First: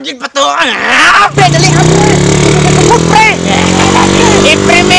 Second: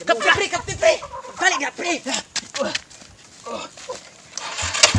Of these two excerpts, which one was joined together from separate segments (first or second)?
first